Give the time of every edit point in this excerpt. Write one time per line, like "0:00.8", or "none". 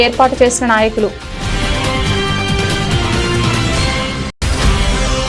0:01.3
0:03.4
0:04.4